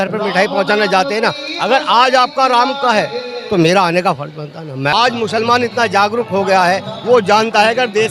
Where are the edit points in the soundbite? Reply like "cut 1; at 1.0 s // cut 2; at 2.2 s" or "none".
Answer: cut 1; at 4.9 s

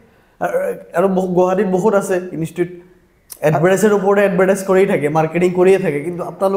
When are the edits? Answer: none

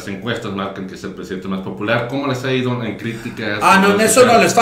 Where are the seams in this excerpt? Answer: none

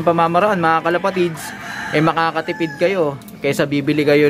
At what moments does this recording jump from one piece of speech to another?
none

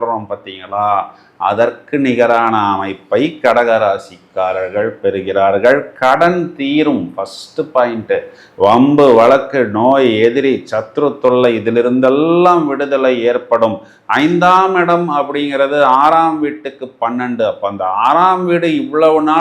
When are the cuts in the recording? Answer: none

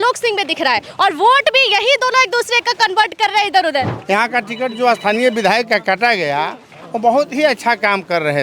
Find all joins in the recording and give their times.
cut 1; at 4.0 s

